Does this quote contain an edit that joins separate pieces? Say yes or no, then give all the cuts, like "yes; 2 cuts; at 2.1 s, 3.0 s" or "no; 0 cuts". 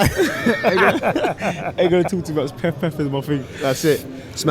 no; 0 cuts